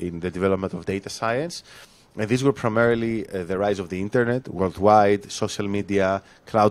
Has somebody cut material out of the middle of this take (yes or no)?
no